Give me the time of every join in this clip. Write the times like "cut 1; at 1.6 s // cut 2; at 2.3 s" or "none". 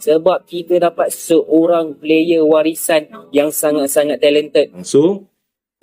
cut 1; at 4.8 s